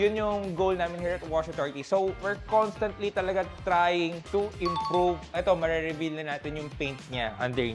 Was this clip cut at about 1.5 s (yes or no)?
no